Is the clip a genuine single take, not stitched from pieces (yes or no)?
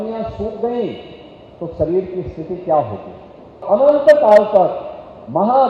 no